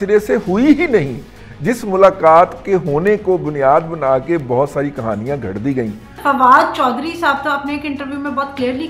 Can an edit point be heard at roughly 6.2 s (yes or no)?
yes